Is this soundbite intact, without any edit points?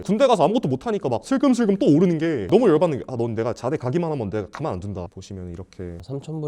no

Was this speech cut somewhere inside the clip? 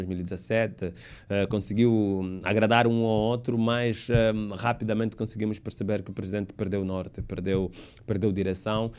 no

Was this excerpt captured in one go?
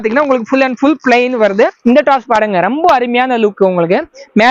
no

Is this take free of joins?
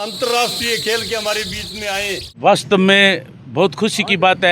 no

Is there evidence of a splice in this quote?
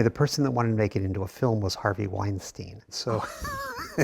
yes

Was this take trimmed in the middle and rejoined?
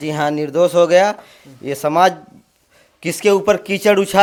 no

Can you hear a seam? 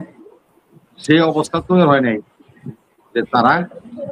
no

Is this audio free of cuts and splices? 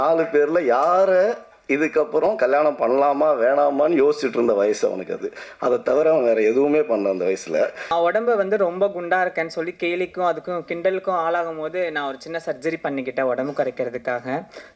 no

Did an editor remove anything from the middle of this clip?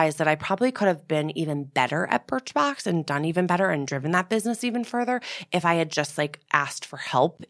no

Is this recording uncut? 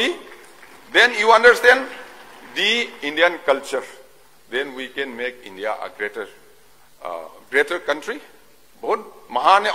no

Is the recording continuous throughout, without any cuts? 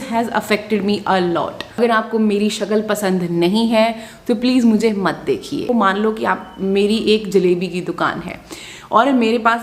no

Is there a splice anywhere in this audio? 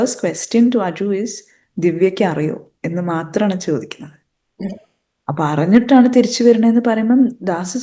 no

